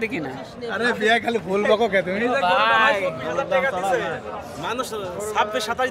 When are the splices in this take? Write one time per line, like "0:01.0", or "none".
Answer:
none

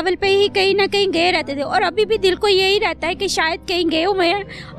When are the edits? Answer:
none

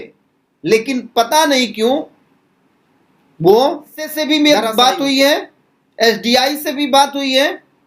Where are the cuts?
0:04.2

